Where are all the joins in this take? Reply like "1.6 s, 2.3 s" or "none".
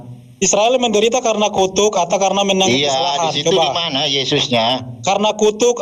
none